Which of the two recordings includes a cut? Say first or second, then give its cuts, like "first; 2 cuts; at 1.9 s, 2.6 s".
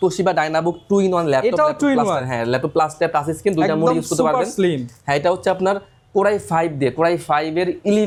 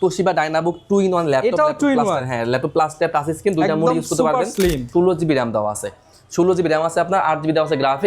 second; 1 cut; at 4.9 s